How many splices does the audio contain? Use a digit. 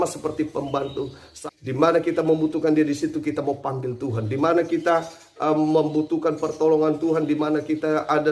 1